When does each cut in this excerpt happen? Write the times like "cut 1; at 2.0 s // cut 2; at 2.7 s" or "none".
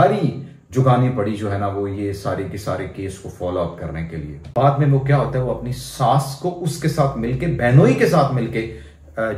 cut 1; at 4.3 s